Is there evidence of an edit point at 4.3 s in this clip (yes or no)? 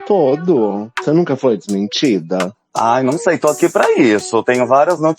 no